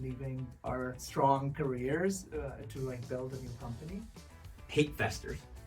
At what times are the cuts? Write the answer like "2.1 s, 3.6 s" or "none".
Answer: 1.0 s, 4.4 s